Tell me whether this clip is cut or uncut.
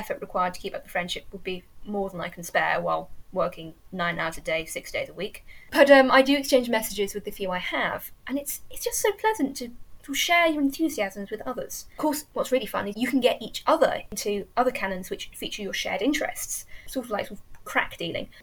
cut